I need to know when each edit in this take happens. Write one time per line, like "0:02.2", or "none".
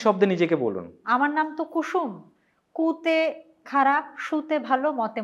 0:01.0